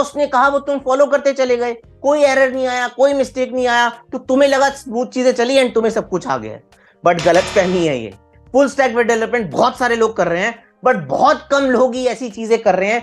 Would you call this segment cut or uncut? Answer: cut